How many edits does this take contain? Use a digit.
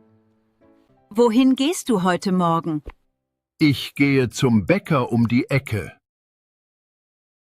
1